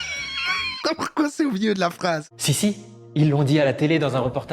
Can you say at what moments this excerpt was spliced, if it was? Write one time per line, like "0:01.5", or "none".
0:02.3